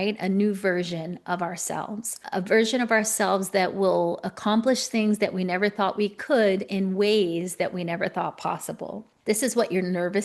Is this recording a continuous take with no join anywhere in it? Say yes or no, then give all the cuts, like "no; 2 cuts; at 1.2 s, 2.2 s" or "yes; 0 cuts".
no; 2 cuts; at 2.2 s, 9.1 s